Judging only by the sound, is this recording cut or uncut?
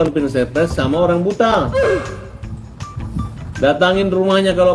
uncut